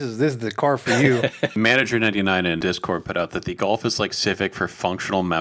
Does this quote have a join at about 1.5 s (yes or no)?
yes